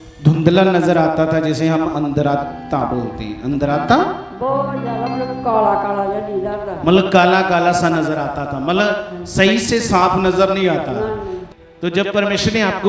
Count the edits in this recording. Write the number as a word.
one